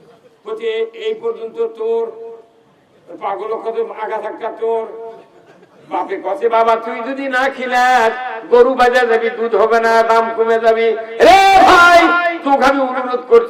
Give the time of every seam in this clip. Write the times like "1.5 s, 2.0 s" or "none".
none